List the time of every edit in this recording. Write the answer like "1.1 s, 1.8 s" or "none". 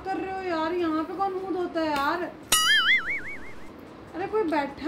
none